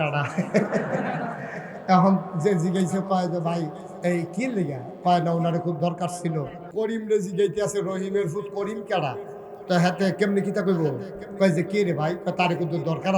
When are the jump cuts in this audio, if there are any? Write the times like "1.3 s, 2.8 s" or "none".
6.6 s